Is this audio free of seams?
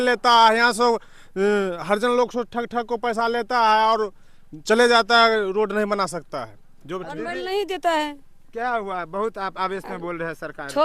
yes; 0 cuts

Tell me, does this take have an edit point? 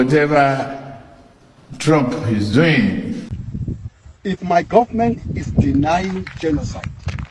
yes; 1 cut; at 3.3 s

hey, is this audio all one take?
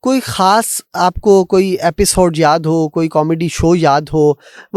yes; 0 cuts

